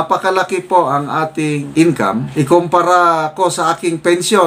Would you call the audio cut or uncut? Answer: uncut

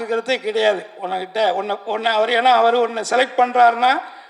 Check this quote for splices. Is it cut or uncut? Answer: uncut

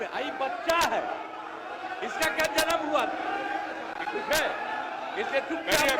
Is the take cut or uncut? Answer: uncut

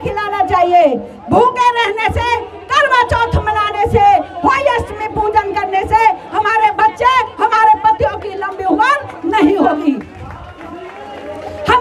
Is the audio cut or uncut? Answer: uncut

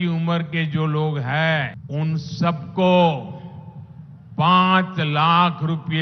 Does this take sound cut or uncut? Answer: cut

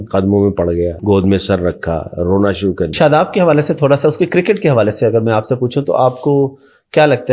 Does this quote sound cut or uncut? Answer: cut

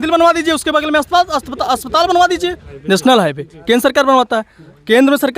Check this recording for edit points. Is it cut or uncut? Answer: cut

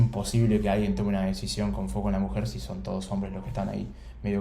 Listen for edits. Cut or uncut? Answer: uncut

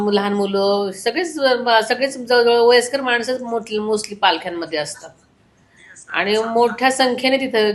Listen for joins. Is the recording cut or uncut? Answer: uncut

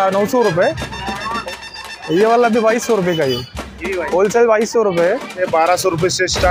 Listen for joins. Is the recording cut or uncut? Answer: cut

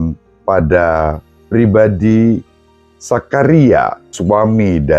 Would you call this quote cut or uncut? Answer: cut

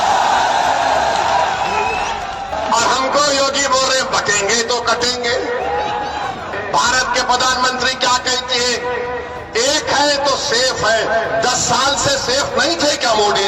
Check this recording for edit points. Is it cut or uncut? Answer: cut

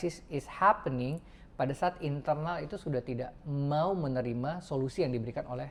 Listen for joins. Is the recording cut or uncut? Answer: uncut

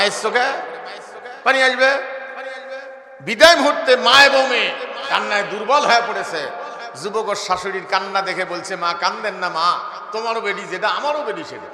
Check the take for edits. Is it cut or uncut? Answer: uncut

